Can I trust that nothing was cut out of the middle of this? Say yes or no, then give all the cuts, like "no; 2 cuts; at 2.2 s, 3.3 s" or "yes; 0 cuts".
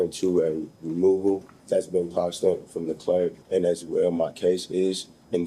no; 2 cuts; at 1.5 s, 3.4 s